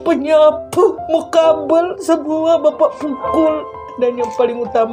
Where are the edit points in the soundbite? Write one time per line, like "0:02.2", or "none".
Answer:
0:03.8